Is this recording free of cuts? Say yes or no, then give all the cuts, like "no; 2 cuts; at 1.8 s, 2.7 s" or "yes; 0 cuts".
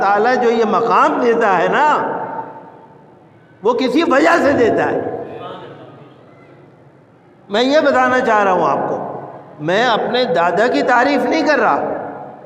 yes; 0 cuts